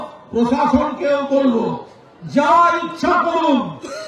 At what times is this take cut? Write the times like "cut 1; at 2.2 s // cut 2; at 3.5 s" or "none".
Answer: none